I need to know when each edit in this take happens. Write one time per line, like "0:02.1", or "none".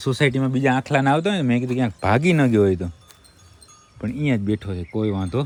none

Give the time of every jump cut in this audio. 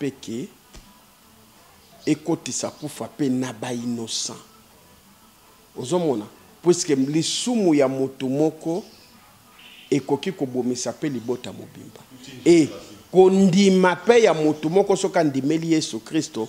none

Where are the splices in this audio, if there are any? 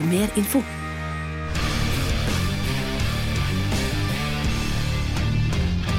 0:01.5

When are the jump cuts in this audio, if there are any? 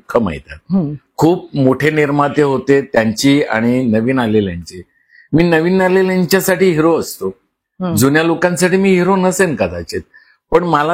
none

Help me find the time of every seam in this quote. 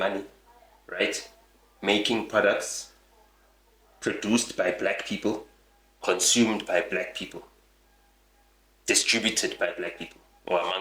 none

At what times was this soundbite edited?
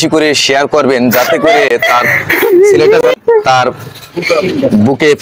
none

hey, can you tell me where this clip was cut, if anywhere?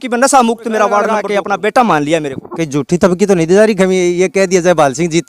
0:01.2

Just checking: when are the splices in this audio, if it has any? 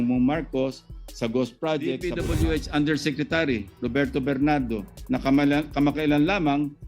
0:02.2

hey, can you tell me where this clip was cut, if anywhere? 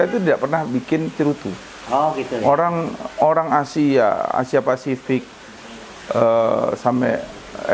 none

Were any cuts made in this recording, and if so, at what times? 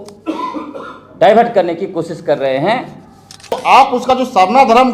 0:03.6

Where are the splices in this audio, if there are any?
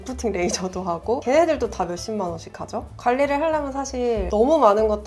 0:02.8

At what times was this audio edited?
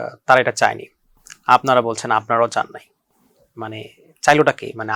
none

